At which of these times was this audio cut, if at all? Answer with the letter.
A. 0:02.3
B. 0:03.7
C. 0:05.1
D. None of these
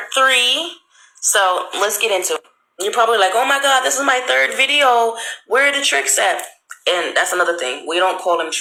D